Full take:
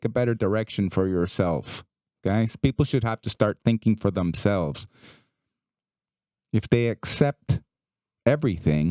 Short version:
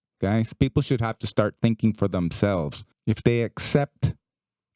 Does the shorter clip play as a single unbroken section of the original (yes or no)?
no